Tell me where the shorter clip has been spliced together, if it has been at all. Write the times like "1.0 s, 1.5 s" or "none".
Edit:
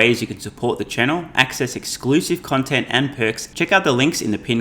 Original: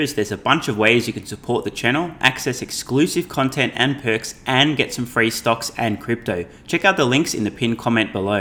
3.4 s